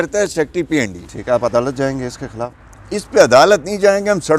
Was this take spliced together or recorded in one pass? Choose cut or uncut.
cut